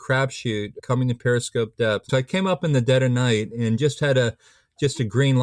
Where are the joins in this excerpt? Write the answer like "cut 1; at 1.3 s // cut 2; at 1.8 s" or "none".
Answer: cut 1; at 0.8 s // cut 2; at 2.1 s